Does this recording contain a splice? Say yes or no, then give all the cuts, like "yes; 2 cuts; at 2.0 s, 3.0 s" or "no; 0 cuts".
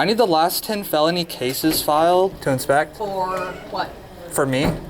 yes; 2 cuts; at 2.5 s, 4.0 s